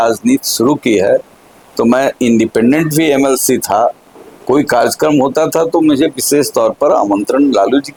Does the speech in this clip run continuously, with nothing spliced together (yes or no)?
yes